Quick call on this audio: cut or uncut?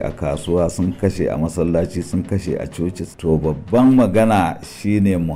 uncut